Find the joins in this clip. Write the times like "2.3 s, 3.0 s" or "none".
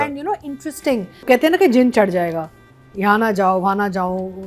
1.2 s